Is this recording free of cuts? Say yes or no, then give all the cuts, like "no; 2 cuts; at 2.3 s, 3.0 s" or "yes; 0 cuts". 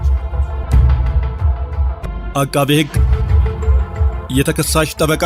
yes; 0 cuts